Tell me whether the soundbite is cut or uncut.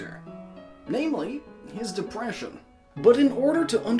uncut